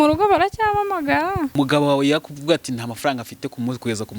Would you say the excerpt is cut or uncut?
cut